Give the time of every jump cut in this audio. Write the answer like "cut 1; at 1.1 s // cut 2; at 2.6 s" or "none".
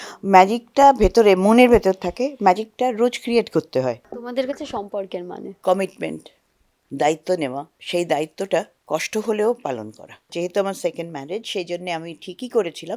cut 1; at 4.1 s // cut 2; at 5.4 s // cut 3; at 7.7 s // cut 4; at 10.3 s